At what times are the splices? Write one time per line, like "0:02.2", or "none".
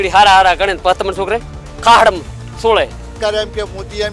0:03.1